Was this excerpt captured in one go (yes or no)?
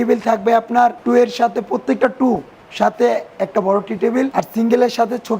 no